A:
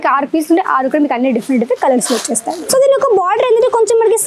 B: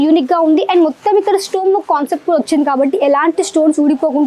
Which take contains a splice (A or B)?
A